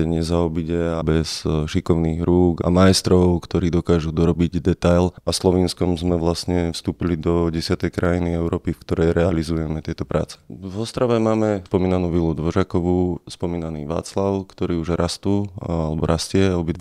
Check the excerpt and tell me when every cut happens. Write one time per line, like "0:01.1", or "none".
0:01.0
0:02.6
0:05.2
0:10.5
0:11.6